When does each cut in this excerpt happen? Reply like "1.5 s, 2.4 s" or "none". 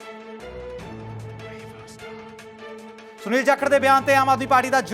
1.6 s